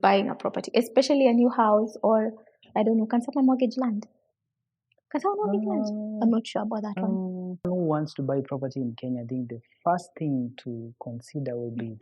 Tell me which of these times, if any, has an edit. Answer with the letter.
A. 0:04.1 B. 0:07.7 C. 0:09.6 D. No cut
B